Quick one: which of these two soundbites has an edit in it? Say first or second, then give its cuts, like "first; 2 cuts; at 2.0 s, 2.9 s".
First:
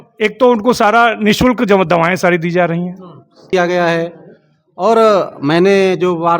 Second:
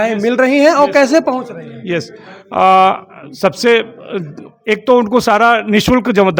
first; 1 cut; at 3.4 s